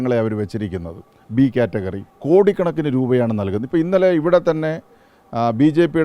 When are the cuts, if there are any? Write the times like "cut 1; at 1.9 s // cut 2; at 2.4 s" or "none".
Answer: cut 1; at 2.1 s